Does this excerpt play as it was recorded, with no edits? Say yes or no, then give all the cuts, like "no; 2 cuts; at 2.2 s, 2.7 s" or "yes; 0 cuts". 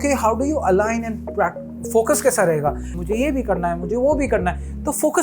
no; 1 cut; at 3.0 s